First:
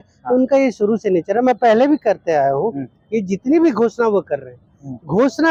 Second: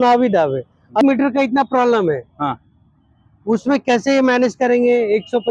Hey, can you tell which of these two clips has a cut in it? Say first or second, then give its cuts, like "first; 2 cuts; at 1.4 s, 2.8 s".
second; 1 cut; at 1.0 s